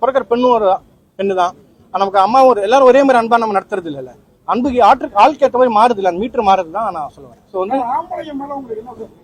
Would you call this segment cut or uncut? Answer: uncut